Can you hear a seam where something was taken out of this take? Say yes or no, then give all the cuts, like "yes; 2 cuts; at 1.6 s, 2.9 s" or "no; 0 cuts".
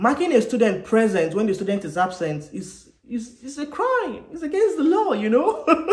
no; 0 cuts